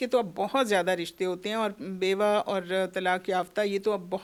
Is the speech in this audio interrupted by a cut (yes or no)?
no